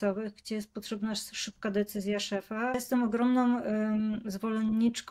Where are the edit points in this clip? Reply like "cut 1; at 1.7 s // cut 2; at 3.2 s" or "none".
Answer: cut 1; at 2.8 s